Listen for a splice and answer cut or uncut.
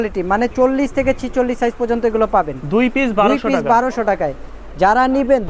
uncut